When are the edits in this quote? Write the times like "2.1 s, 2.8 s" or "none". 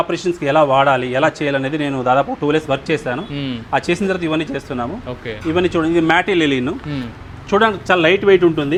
none